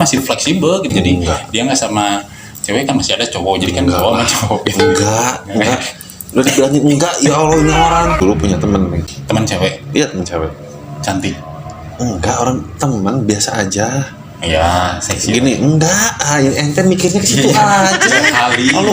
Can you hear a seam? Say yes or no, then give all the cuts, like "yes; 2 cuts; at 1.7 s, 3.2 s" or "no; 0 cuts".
yes; 3 cuts; at 0.9 s, 8.2 s, 9.1 s